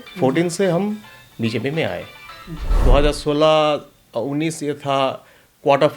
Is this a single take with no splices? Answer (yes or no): no